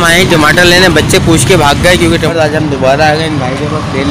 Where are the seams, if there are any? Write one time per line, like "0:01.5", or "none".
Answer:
0:02.3

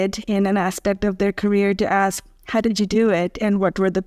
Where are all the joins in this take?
none

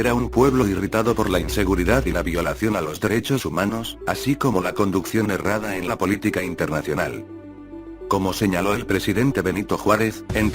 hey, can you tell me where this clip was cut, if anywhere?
0:01.2

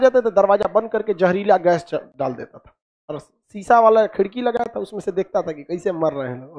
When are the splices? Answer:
none

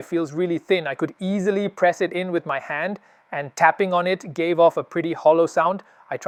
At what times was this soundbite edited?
none

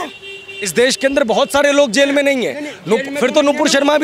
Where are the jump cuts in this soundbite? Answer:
none

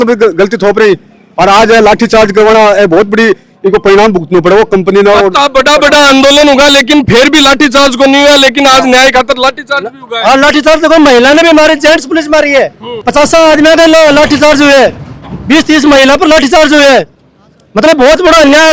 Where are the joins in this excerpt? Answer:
none

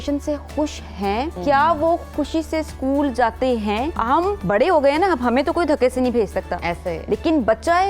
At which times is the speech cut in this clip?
0:01.4
0:04.2

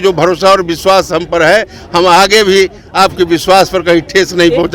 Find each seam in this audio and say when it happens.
none

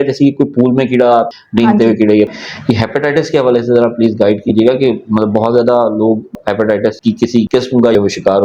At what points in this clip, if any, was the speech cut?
0:02.4
0:06.3

